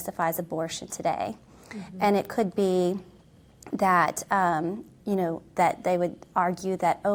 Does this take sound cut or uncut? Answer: uncut